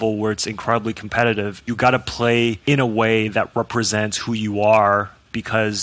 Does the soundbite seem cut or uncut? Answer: cut